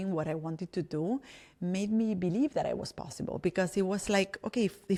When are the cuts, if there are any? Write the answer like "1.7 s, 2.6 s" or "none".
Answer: none